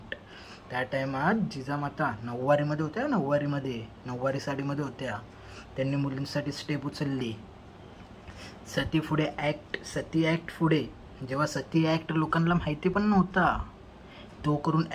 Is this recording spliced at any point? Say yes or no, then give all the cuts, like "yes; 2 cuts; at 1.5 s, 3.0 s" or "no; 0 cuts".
no; 0 cuts